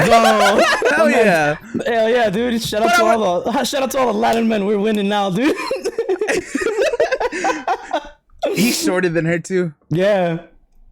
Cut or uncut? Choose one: cut